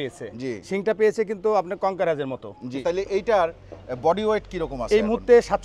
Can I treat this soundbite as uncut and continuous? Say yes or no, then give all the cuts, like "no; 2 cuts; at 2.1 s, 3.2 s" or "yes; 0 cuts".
yes; 0 cuts